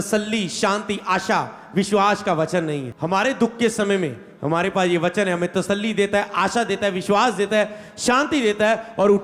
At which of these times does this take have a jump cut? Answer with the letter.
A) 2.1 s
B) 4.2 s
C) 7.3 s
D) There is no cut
D